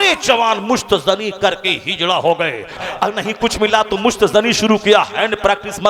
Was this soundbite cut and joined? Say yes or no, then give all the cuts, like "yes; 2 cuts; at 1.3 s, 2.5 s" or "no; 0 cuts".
yes; 1 cut; at 2.8 s